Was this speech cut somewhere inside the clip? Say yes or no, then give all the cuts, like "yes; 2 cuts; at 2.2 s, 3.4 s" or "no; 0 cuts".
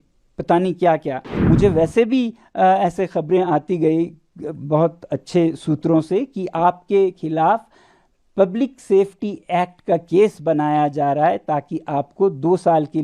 yes; 1 cut; at 1.3 s